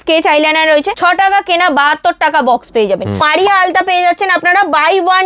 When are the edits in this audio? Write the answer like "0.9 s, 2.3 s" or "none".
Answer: 0.9 s, 3.2 s